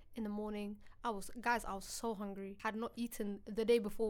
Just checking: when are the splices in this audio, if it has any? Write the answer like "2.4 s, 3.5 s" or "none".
2.5 s